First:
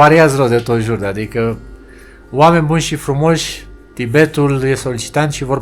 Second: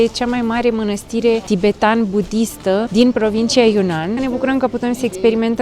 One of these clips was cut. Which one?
second; 3 cuts; at 1.4 s, 2.9 s, 4.2 s

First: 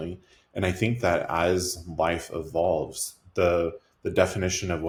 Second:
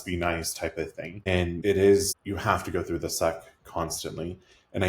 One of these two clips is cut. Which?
second; 2 cuts; at 1.5 s, 2.2 s

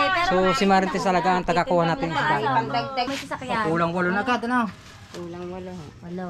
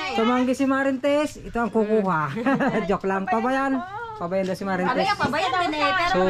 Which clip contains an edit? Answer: first; 1 cut; at 3.1 s

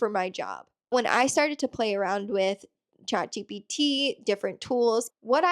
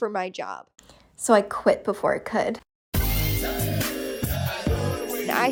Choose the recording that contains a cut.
first; 1 cut; at 1.0 s

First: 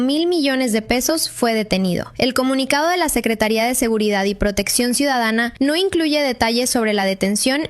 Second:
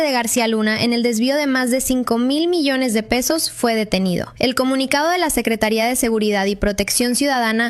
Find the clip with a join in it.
second; 1 cut; at 1.0 s

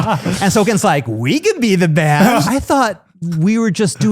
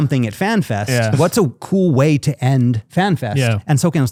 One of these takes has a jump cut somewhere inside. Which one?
first; 1 cut; at 2.4 s

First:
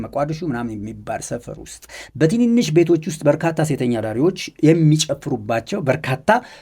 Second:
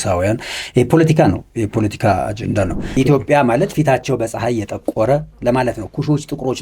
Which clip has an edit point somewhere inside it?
second; 1 cut; at 2.8 s

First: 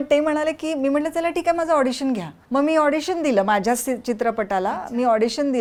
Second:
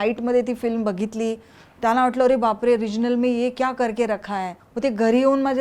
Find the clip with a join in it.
second; 1 cut; at 4.6 s

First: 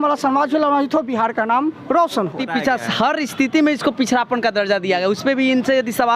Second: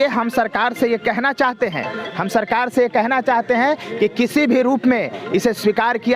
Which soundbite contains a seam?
first; 1 cut; at 2.4 s

